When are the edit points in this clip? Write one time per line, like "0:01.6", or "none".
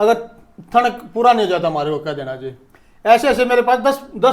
none